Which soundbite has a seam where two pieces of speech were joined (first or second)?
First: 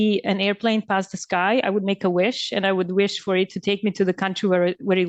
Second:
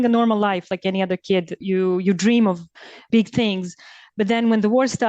second